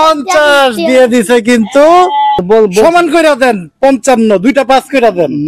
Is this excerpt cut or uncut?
cut